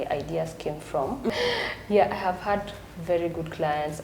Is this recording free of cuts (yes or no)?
no